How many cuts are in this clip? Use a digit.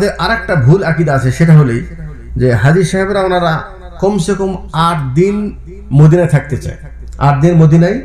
0